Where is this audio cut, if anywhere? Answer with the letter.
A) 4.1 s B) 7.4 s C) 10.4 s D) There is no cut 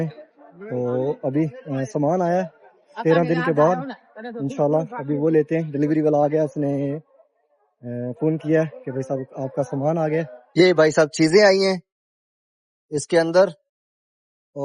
C